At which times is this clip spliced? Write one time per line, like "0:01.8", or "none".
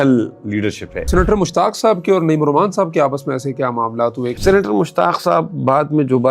0:01.1
0:04.4